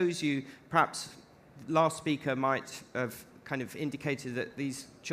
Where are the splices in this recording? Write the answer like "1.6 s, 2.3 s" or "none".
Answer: none

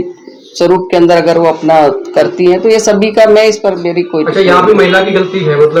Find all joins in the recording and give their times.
none

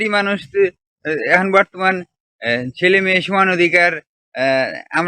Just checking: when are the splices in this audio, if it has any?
none

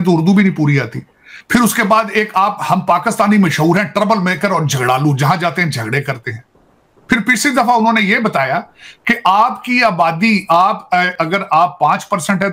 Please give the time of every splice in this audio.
none

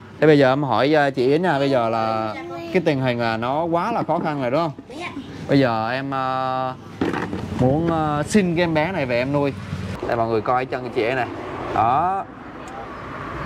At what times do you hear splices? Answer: 9.8 s

